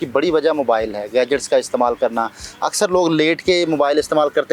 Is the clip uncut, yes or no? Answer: yes